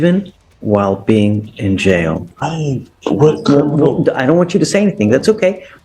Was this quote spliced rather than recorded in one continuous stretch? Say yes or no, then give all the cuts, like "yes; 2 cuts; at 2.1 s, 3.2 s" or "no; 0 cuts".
yes; 1 cut; at 2.2 s